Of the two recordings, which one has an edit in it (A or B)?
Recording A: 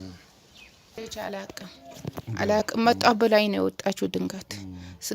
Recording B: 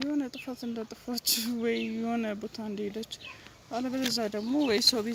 A